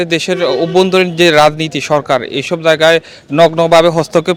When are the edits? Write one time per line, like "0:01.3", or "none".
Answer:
none